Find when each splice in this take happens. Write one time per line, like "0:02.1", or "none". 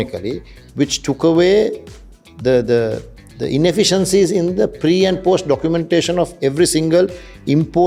none